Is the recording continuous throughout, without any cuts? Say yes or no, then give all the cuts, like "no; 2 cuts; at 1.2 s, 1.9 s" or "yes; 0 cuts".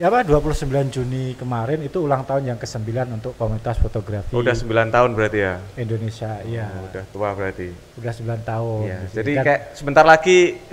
yes; 0 cuts